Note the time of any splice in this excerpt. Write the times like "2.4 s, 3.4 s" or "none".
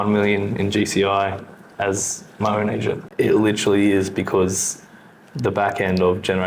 3.1 s